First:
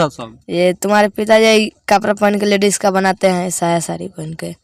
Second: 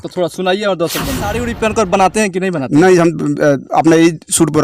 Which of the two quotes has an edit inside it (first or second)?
second